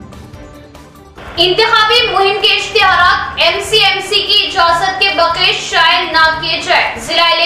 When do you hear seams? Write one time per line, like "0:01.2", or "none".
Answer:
0:01.1

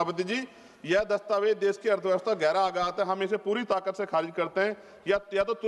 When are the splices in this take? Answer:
none

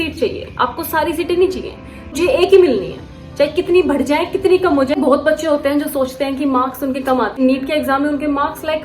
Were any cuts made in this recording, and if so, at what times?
0:02.2
0:05.0
0:07.4

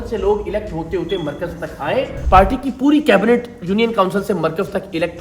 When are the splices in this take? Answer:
0:02.2

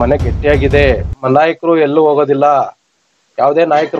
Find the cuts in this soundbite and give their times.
0:01.2

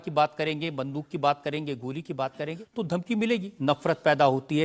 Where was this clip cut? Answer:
0:02.6
0:03.5

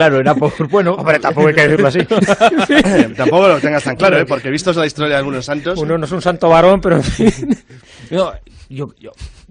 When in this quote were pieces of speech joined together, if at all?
0:07.5

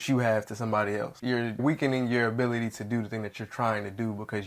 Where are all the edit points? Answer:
0:01.2

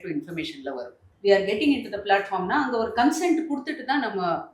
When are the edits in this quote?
0:01.0

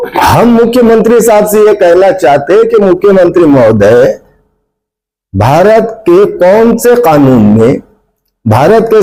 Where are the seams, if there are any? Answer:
none

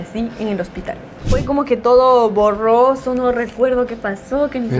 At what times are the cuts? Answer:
0:01.3

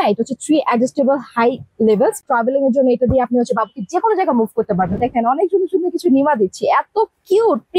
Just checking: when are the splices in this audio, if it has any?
0:02.2
0:05.0

